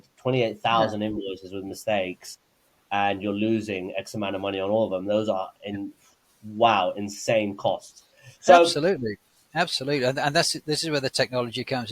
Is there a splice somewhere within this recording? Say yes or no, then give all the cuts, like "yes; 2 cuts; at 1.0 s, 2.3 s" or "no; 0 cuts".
yes; 1 cut; at 8.7 s